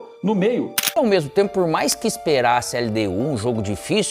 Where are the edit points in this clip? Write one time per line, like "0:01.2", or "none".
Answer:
0:00.9